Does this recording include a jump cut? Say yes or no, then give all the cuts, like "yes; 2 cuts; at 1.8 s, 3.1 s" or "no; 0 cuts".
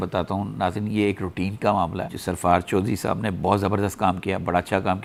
no; 0 cuts